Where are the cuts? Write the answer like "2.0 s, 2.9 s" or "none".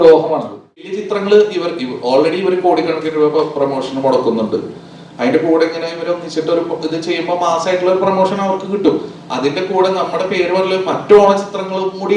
1.0 s